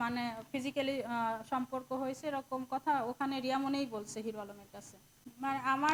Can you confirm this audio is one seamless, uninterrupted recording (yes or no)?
yes